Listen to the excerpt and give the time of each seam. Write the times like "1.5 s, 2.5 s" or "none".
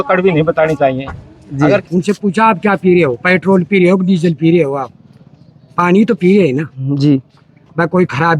1.9 s